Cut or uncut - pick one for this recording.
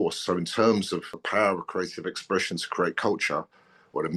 cut